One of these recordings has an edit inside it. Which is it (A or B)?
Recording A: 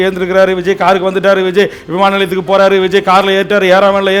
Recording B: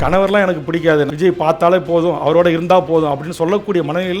B